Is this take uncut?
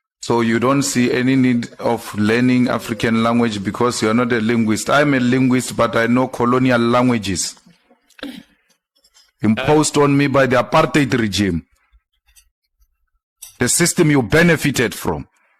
yes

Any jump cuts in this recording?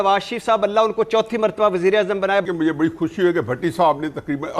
yes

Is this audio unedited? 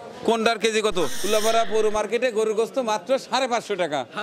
no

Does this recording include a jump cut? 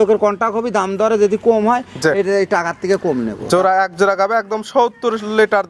no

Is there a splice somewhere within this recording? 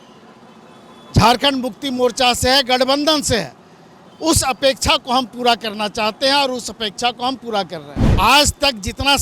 yes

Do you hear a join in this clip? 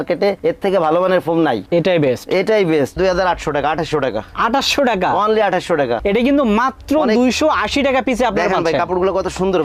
yes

